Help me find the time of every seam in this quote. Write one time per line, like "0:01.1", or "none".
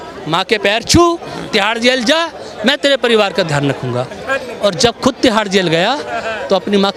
none